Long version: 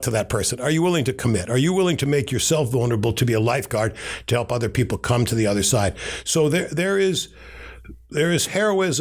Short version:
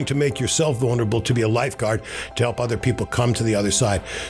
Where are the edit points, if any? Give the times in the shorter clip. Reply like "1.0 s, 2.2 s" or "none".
none

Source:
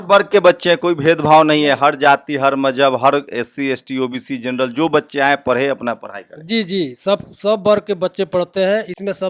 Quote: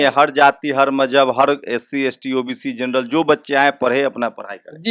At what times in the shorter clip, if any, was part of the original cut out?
none

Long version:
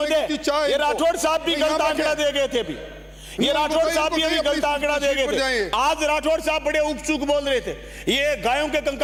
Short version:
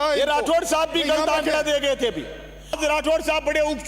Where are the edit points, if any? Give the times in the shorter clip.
2.8 s

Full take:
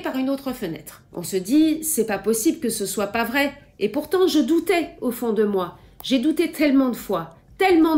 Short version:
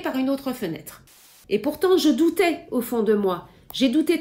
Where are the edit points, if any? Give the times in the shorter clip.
1.2 s

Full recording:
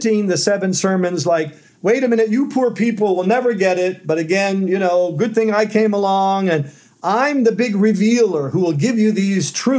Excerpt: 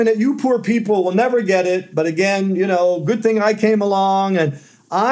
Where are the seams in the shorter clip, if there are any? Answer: none

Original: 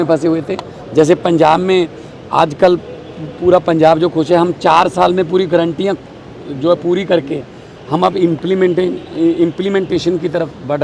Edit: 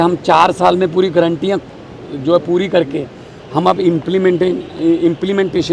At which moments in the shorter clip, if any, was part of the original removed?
none

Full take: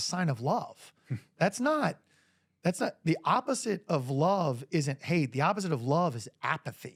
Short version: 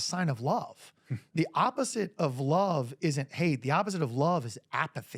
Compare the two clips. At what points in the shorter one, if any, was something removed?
1.3 s

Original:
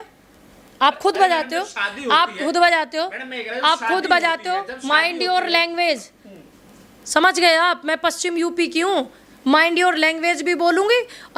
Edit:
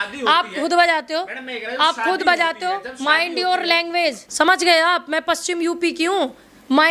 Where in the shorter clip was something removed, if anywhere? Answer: 4.2 s

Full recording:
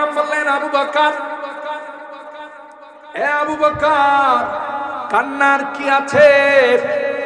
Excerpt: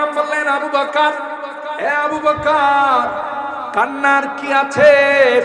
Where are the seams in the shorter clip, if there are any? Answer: 1.8 s

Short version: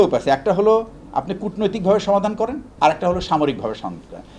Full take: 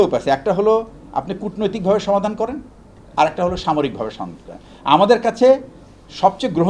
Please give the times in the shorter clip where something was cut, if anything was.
2.6 s

